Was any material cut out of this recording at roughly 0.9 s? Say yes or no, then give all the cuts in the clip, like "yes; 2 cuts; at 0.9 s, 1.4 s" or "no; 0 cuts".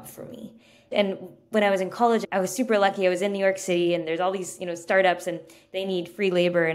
yes; 2 cuts; at 0.9 s, 2.2 s